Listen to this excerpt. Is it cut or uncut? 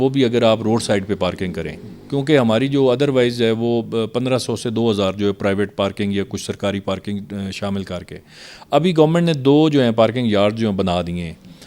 uncut